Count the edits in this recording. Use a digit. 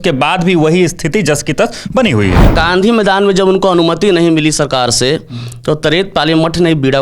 1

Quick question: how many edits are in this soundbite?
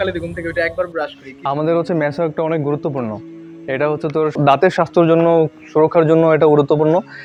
0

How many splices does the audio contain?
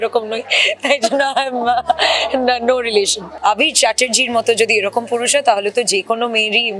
1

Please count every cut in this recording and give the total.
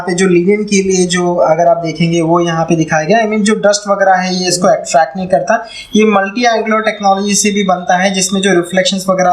0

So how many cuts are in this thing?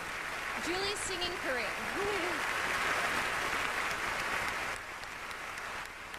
0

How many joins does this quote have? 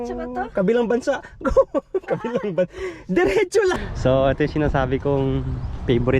1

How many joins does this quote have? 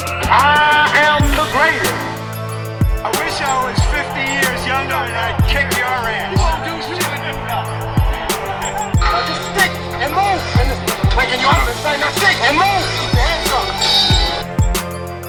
0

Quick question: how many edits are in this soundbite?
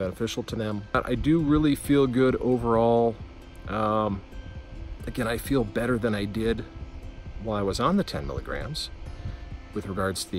1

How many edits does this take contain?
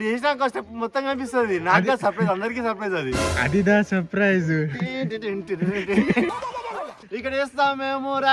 1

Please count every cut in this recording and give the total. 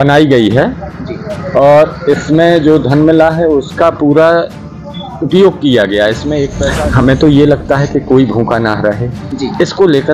1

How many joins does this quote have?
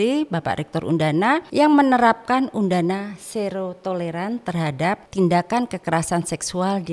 2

